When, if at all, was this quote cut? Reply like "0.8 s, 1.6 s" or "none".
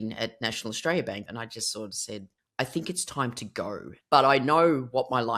1.3 s, 2.4 s, 3.9 s